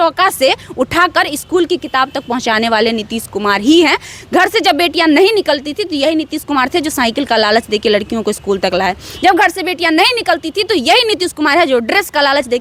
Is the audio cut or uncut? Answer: uncut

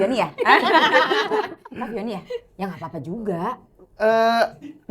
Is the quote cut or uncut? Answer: uncut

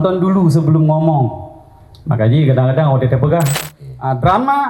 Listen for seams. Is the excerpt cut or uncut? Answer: cut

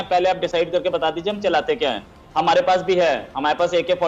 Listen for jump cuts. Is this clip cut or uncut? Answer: uncut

